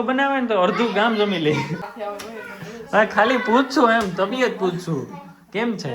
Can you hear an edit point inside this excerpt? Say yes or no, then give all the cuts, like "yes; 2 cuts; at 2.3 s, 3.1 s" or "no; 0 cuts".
yes; 1 cut; at 1.9 s